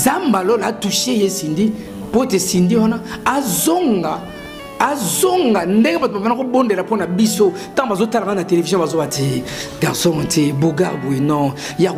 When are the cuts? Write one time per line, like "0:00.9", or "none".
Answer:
none